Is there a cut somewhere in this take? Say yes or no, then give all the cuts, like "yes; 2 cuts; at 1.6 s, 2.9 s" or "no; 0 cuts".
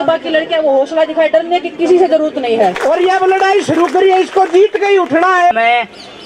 yes; 2 cuts; at 2.8 s, 5.5 s